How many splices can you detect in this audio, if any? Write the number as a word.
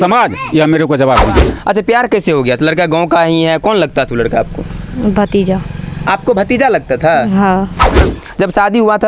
two